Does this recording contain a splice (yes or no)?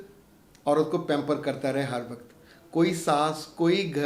no